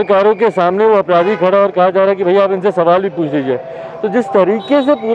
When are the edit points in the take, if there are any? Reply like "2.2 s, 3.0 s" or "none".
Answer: none